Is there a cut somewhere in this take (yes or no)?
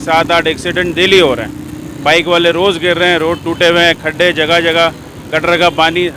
no